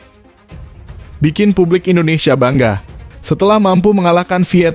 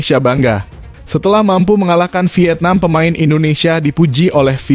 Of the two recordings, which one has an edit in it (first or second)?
first